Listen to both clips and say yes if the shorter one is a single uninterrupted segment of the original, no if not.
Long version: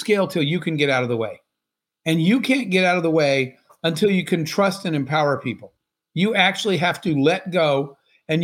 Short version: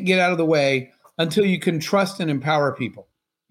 yes